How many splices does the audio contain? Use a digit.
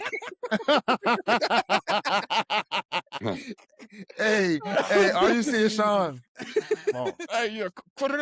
2